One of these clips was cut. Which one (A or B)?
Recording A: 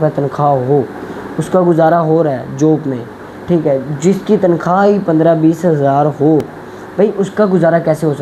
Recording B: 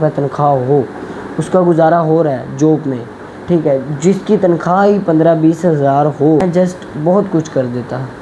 B